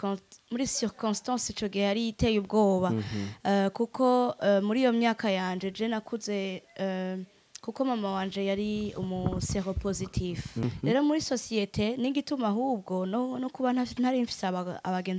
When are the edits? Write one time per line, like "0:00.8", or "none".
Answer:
0:10.6